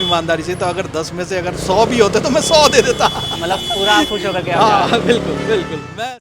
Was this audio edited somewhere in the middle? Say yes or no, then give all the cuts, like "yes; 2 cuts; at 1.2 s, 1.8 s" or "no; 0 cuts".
no; 0 cuts